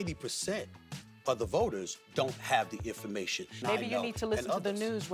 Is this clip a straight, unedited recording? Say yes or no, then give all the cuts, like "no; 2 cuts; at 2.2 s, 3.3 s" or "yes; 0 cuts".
no; 1 cut; at 3.6 s